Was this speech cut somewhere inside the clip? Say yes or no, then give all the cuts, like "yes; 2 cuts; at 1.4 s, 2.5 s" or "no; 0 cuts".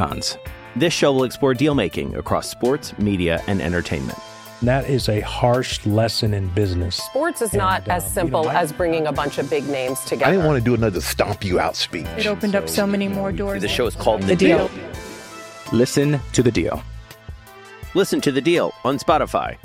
no; 0 cuts